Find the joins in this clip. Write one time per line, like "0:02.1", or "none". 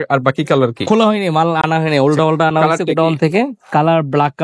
none